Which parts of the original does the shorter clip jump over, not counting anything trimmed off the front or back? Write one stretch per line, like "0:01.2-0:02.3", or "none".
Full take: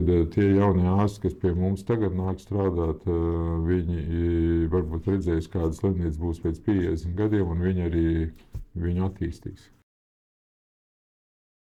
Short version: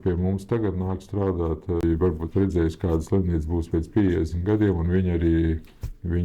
0:03.2-0:04.5